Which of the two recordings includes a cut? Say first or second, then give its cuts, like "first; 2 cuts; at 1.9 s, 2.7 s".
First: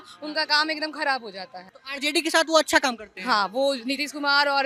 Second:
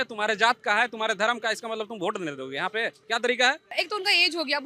second; 1 cut; at 3.7 s